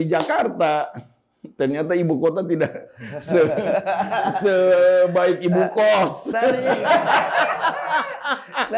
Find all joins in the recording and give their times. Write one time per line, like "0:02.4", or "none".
none